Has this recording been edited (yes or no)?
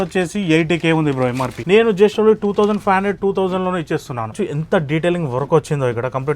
yes